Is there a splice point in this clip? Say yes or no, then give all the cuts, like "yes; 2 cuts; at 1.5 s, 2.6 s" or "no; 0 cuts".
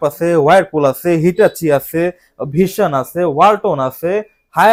no; 0 cuts